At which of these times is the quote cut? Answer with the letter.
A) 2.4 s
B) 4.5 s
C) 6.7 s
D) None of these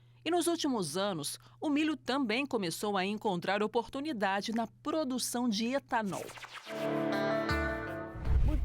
C